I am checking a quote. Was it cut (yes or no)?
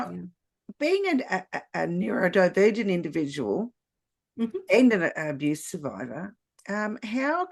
no